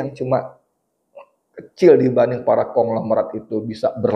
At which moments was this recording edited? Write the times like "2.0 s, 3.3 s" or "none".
none